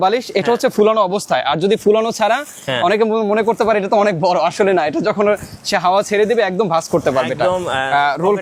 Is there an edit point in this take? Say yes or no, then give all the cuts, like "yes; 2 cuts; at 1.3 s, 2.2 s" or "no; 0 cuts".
no; 0 cuts